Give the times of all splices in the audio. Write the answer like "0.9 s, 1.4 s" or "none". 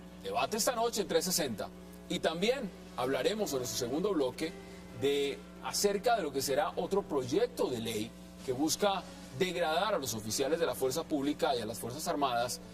6.2 s